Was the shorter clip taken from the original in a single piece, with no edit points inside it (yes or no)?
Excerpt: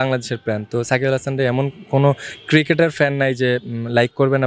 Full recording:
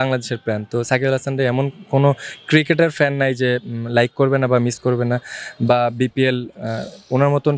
yes